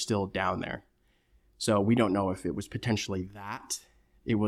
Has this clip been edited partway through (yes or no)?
no